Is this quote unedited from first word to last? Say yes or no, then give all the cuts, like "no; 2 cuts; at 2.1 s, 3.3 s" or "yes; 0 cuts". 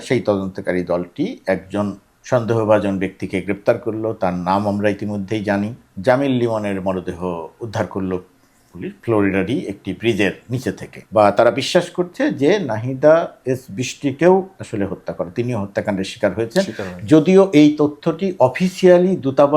no; 2 cuts; at 5.8 s, 10.9 s